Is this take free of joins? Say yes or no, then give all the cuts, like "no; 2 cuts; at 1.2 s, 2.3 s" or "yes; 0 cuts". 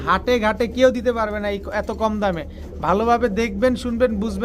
yes; 0 cuts